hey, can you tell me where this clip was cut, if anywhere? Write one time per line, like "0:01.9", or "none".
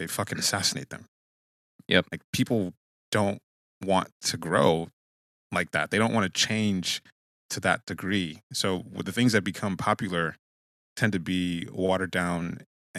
none